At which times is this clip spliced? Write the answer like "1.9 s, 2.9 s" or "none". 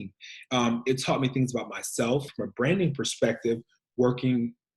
2.3 s